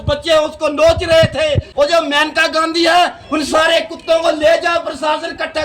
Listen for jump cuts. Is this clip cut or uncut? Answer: cut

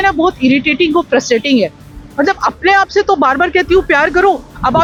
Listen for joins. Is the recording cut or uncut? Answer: uncut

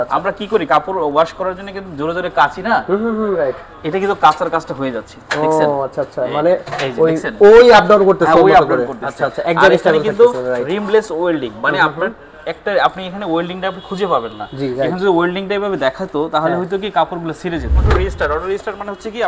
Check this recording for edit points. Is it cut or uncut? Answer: cut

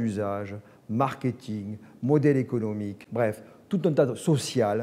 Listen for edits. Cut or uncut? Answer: uncut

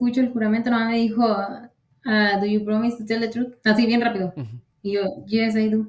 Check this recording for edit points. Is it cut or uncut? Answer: uncut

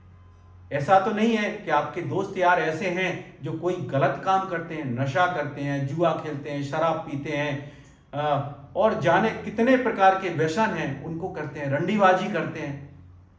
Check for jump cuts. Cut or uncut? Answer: uncut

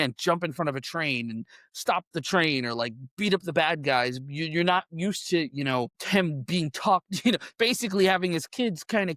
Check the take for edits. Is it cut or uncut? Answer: uncut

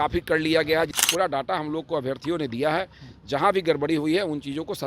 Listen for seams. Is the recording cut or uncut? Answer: cut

